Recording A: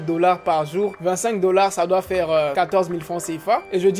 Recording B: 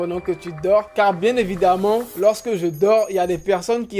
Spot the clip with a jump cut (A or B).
A